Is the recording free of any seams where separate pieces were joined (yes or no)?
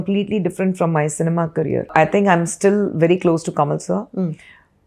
no